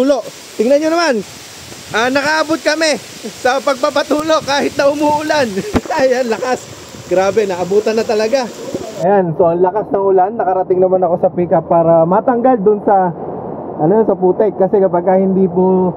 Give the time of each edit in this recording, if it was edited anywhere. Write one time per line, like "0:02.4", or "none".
0:08.8